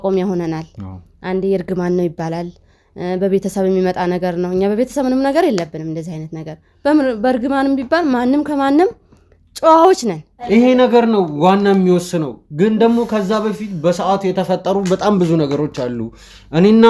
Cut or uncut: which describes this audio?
cut